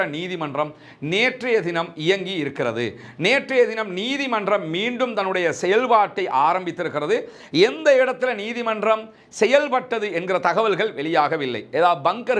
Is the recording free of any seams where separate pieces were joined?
yes; 0 cuts

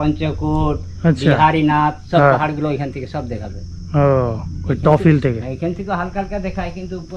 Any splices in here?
no; 0 cuts

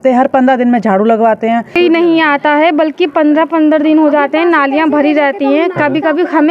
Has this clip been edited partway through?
yes; 1 cut; at 1.7 s

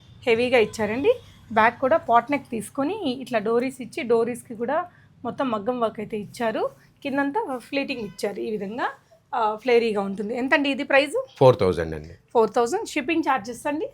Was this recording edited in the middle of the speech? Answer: no; 0 cuts

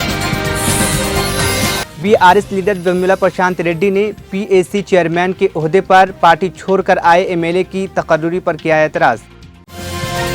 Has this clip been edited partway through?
yes; 1 cut; at 1.9 s

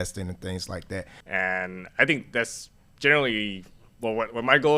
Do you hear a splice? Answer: yes; 1 cut; at 1.2 s

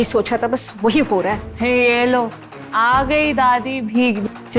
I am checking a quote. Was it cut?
no; 0 cuts

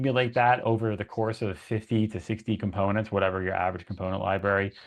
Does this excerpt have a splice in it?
no; 0 cuts

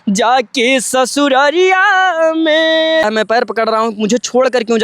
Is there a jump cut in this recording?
yes; 1 cut; at 3.0 s

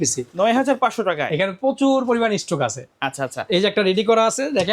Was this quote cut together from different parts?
no; 0 cuts

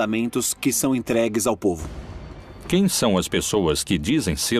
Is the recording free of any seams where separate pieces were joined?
yes; 0 cuts

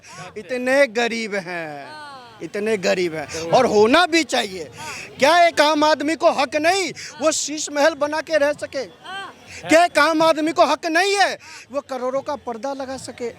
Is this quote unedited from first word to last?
yes; 0 cuts

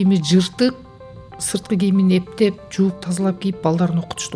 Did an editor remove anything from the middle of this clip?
no; 0 cuts

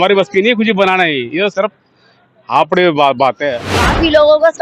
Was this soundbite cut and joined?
yes; 1 cut; at 3.6 s

